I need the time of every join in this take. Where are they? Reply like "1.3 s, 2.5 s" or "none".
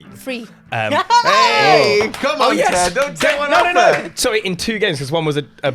none